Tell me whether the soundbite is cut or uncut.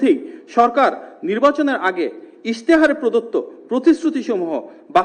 uncut